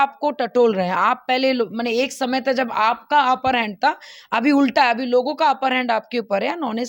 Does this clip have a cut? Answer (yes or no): no